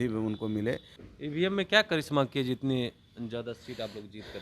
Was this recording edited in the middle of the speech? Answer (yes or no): yes